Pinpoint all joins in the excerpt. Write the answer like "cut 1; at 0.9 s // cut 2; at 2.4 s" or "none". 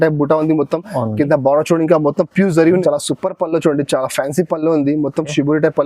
cut 1; at 2.8 s